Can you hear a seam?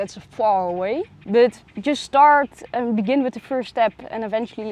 yes; 1 cut; at 1.2 s

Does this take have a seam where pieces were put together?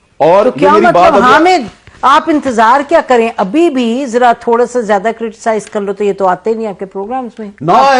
no; 0 cuts

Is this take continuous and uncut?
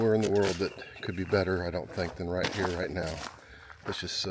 yes; 0 cuts

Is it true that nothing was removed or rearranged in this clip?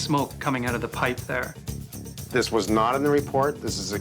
no; 1 cut; at 1.9 s

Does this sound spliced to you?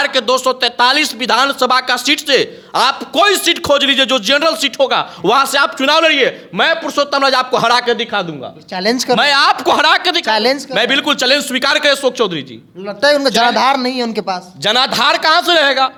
no; 0 cuts

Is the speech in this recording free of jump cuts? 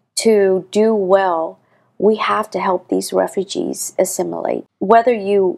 no; 1 cut; at 4.7 s

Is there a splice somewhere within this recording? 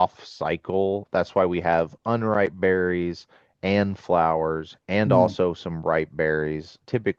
no; 0 cuts

